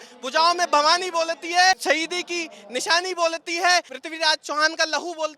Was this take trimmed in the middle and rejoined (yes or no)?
yes